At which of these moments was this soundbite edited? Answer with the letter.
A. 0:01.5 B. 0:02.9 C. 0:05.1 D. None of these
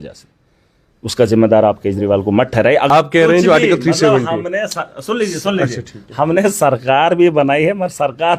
B